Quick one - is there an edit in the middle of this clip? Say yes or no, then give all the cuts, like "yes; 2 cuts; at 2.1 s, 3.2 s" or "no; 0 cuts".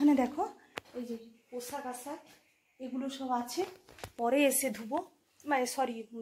no; 0 cuts